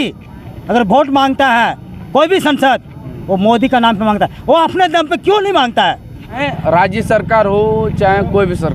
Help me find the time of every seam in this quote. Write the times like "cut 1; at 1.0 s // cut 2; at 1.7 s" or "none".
cut 1; at 6.4 s